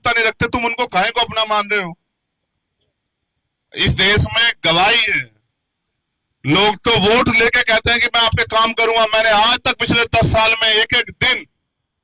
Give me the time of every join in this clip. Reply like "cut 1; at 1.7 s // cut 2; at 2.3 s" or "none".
none

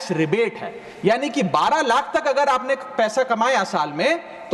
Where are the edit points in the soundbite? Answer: none

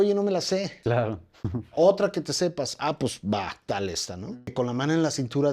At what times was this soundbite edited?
cut 1; at 4.4 s

